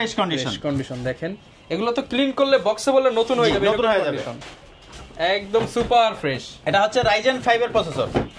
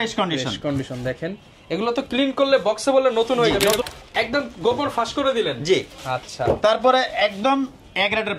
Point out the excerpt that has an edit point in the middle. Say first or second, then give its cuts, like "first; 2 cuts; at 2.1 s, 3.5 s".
second; 1 cut; at 3.8 s